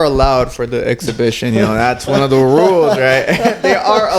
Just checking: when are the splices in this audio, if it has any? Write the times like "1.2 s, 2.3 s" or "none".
none